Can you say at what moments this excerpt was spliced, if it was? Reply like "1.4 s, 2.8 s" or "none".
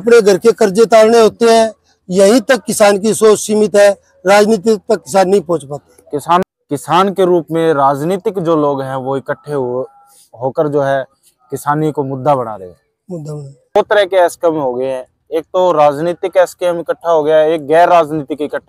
6.4 s, 13.8 s